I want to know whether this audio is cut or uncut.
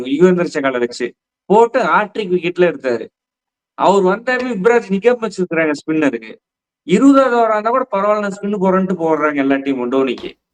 uncut